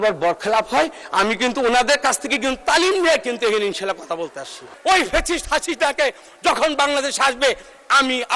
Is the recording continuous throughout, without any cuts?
no; 1 cut; at 4.7 s

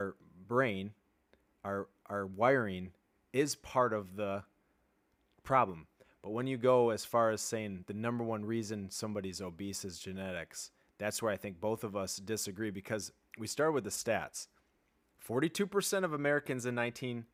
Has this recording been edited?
no; 0 cuts

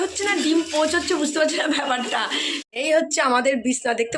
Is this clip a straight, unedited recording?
no; 1 cut; at 2.7 s

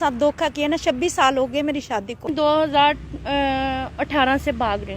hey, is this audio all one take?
no; 1 cut; at 2.3 s

